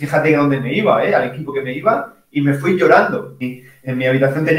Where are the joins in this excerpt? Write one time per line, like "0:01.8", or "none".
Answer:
0:03.5